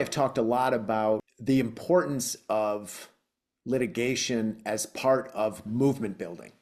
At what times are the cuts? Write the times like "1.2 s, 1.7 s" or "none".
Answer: 1.3 s